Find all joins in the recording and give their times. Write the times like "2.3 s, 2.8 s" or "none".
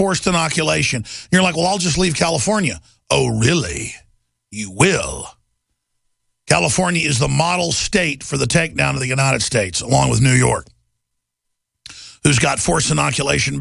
11.2 s